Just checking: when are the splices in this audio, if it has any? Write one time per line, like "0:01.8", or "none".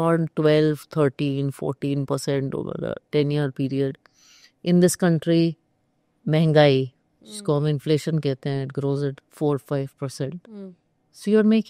none